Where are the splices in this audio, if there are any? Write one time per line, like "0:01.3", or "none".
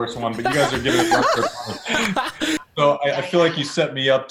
0:02.6

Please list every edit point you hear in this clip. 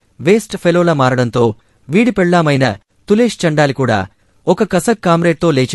0:04.2

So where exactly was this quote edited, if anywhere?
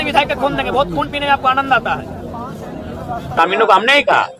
0:03.4

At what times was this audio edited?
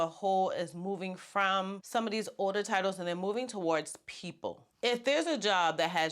0:01.8
0:04.7

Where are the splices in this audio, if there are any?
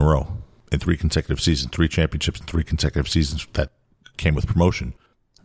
none

